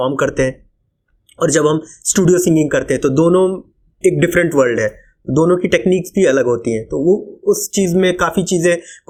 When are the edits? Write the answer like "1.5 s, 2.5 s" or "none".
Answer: none

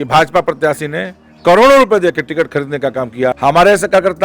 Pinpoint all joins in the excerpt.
3.4 s

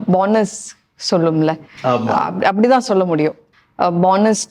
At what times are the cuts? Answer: 3.5 s

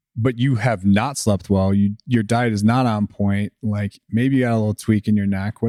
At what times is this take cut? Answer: none

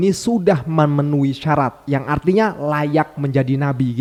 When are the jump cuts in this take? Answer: none

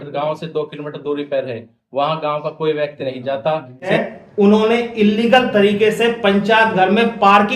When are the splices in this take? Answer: 3.9 s

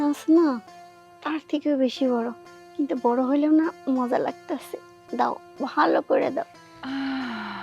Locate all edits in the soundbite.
6.6 s

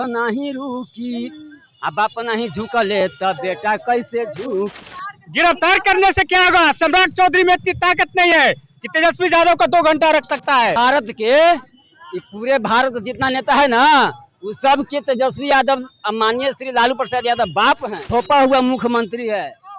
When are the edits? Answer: 4.9 s, 10.8 s, 17.9 s

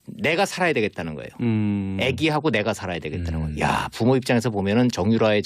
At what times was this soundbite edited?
2.0 s

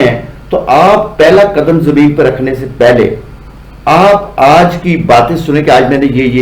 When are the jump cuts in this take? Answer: none

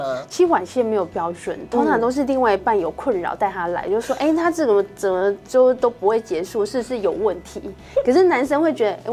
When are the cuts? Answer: none

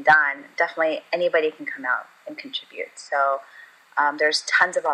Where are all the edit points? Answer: none

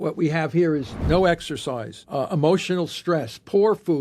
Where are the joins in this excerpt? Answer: 1.9 s

